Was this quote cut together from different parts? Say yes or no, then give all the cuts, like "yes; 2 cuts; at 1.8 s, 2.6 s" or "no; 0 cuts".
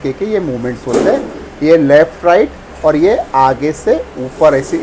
no; 0 cuts